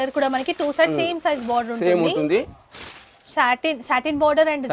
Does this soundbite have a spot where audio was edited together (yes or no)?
no